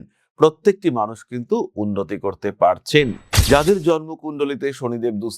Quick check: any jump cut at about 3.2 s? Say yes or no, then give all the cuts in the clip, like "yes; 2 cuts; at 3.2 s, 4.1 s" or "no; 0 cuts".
yes; 1 cut; at 3.2 s